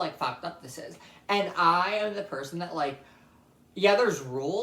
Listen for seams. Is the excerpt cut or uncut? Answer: uncut